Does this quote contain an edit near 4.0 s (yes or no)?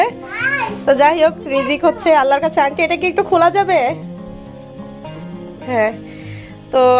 no